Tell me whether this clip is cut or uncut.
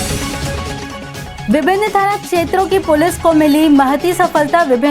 cut